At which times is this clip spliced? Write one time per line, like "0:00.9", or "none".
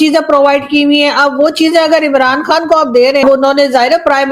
0:03.2